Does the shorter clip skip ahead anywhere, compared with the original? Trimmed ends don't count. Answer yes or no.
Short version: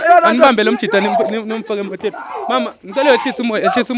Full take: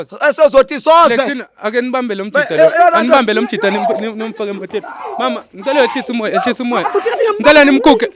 no